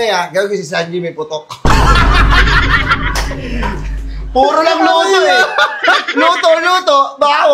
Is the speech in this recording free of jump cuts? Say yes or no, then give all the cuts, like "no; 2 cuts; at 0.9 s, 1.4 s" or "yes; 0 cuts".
yes; 0 cuts